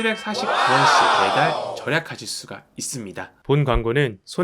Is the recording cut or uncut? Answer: cut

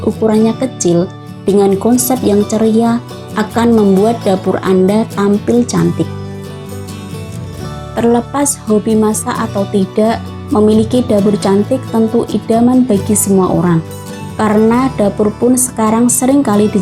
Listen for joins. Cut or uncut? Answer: cut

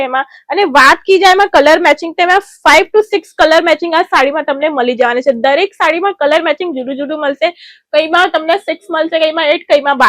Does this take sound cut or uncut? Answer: uncut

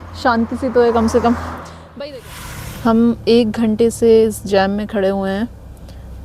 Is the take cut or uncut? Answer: cut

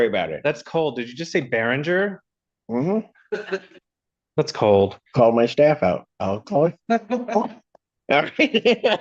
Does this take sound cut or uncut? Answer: uncut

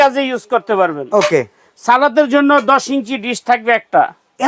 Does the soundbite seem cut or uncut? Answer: uncut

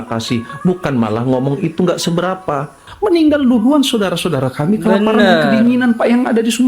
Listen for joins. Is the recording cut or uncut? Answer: cut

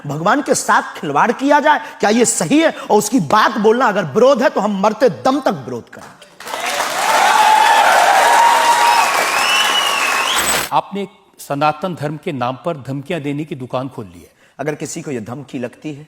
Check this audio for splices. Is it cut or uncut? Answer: cut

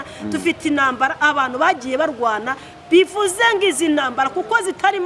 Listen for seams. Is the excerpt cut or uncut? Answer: uncut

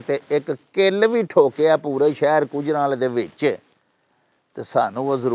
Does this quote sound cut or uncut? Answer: uncut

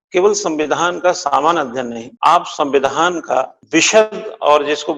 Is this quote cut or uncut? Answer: cut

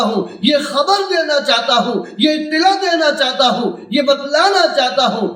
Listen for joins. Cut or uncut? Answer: uncut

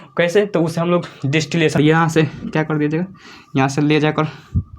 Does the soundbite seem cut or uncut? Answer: cut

